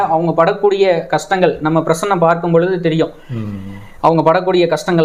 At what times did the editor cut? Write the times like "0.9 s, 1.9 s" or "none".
none